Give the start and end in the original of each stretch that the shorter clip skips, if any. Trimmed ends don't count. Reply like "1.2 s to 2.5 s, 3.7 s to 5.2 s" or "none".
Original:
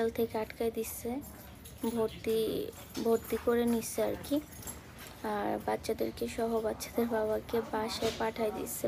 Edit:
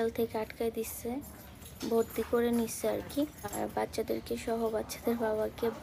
1.7 s to 2.8 s, 4.7 s to 5.4 s